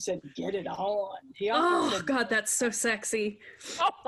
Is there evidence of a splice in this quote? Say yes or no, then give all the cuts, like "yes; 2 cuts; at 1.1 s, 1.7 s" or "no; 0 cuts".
no; 0 cuts